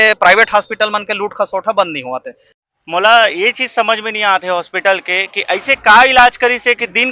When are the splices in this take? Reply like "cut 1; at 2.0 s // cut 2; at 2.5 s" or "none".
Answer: cut 1; at 2.4 s